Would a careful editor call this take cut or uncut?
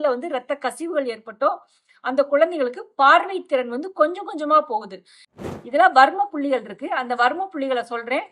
cut